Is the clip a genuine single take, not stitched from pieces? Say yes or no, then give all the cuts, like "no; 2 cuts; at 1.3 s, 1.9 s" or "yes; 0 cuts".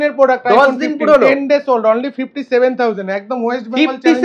yes; 0 cuts